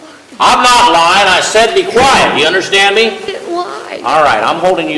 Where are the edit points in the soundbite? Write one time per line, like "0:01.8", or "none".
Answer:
none